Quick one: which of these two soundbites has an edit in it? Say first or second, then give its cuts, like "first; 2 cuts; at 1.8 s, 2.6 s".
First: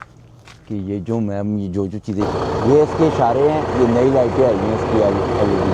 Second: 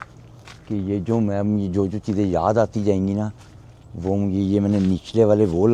first; 1 cut; at 2.2 s